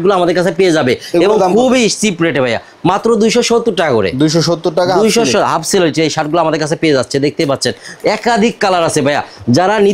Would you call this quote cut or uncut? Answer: uncut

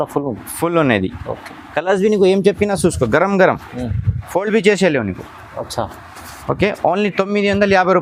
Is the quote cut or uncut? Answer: uncut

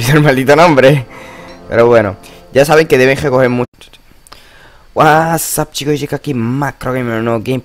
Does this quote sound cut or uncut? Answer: uncut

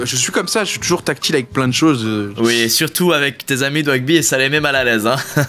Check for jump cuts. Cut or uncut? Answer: uncut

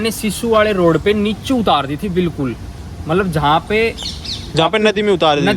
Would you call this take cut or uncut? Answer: uncut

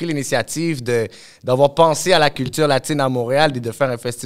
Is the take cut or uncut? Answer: uncut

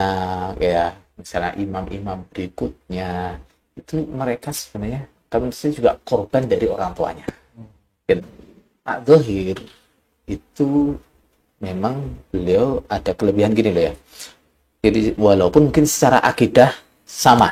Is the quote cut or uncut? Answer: cut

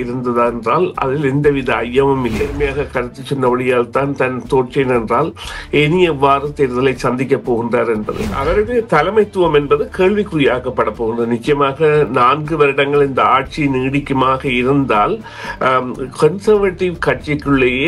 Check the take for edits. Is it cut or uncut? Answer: cut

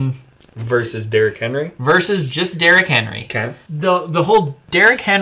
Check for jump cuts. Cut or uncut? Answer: cut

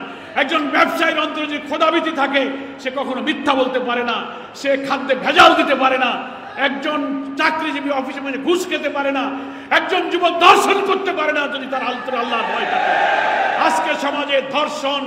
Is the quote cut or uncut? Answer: uncut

